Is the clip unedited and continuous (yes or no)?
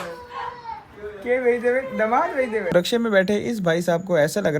no